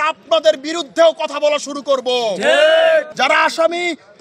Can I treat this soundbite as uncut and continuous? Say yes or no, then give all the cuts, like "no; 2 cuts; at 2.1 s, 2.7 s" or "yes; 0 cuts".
no; 1 cut; at 3.1 s